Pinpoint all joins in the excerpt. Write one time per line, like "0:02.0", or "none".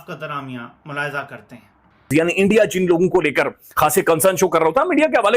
0:02.1